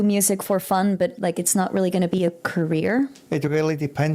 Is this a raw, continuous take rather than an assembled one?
no; 1 cut; at 3.2 s

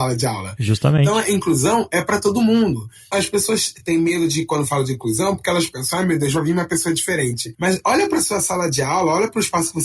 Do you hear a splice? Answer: yes; 3 cuts; at 1.1 s, 3.1 s, 7.5 s

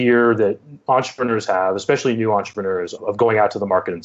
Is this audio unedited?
no; 1 cut; at 3.0 s

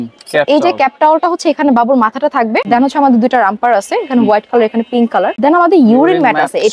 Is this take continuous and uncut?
no; 2 cuts; at 2.6 s, 5.3 s

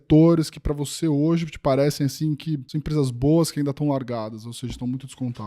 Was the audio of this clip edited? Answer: yes; 1 cut; at 2.7 s

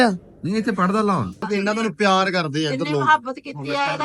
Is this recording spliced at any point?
yes; 1 cut; at 1.4 s

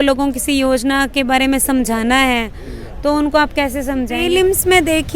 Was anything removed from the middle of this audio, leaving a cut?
yes; 1 cut; at 4.2 s

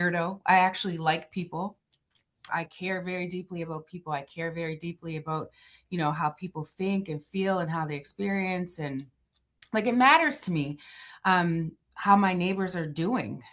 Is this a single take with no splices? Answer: no; 1 cut; at 2.4 s

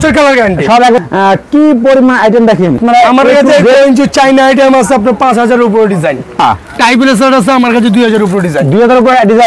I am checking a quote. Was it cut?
yes; 3 cuts; at 1.0 s, 2.8 s, 6.4 s

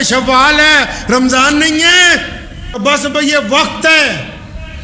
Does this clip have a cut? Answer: yes; 1 cut; at 2.8 s

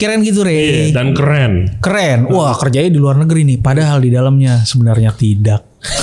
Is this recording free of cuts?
yes; 0 cuts

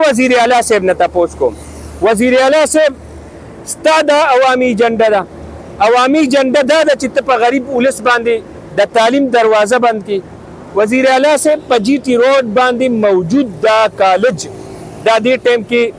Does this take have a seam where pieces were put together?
no; 0 cuts

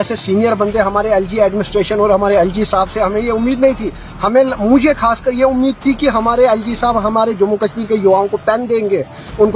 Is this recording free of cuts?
yes; 0 cuts

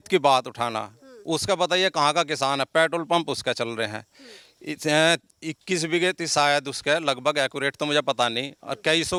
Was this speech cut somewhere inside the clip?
no; 0 cuts

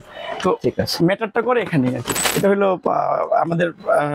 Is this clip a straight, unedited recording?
no; 1 cut; at 2.1 s

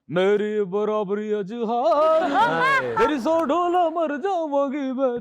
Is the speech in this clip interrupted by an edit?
no; 0 cuts

